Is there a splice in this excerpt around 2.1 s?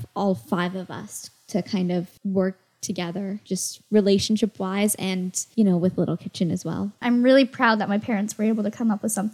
yes; 4 cuts; at 2.1 s, 3.4 s, 5.4 s, 7.0 s

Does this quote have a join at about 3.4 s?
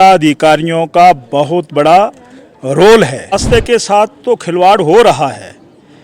yes; 1 cut; at 3.4 s

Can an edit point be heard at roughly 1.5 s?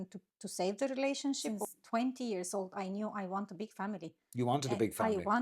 yes; 1 cut; at 1.5 s

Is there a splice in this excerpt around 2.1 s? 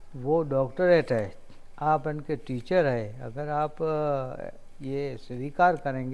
no; 0 cuts

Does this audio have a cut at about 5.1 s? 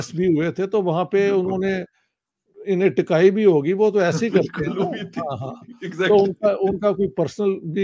no; 0 cuts

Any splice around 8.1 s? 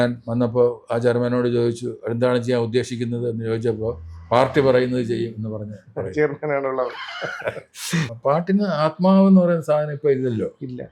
yes; 1 cut; at 8.1 s

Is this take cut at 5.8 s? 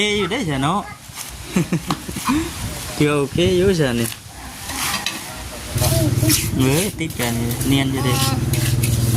yes; 1 cut; at 5.8 s

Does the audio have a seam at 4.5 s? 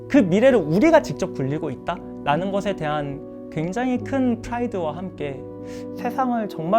no; 1 cut; at 5.7 s

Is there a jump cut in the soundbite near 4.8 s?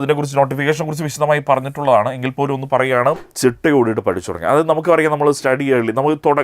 no; 1 cut; at 3.3 s

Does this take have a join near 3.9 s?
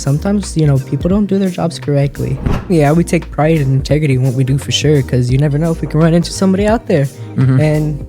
no; 1 cut; at 2.5 s

